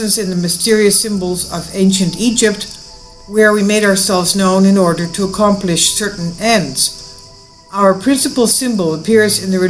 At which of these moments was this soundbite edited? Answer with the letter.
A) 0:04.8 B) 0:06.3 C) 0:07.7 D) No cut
D